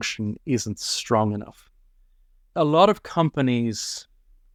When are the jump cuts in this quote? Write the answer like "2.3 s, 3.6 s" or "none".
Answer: none